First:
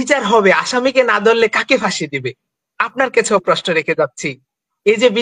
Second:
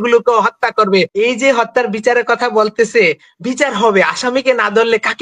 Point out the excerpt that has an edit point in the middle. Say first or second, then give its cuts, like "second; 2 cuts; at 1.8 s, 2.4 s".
second; 1 cut; at 1.1 s